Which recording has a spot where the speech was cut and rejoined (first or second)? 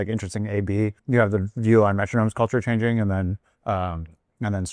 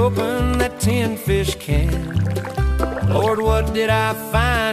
first